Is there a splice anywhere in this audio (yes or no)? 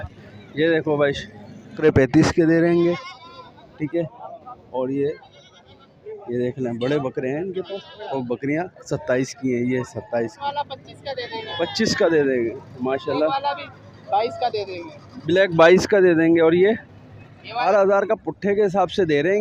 yes